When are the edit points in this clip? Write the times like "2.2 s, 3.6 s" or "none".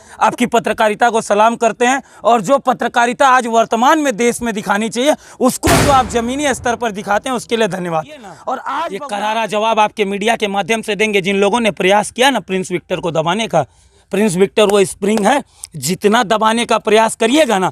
8.7 s